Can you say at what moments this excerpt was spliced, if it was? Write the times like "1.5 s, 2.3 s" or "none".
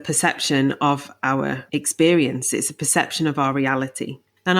1.6 s